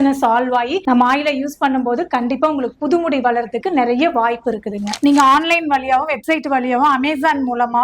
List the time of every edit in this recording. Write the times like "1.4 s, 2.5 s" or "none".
0.8 s, 4.9 s